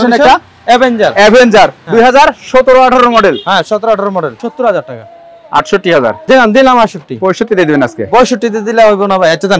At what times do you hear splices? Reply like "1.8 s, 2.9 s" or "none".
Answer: 4.3 s, 6.2 s